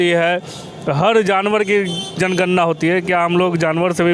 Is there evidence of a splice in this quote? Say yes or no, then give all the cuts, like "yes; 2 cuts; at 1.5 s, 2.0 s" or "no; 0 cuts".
no; 0 cuts